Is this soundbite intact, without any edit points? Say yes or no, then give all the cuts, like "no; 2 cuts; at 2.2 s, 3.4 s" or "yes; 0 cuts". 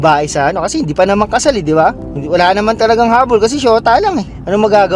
no; 1 cut; at 2.1 s